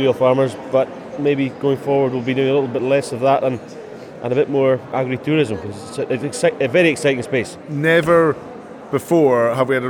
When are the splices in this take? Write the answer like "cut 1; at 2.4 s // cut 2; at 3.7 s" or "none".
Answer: cut 1; at 4.9 s // cut 2; at 7.6 s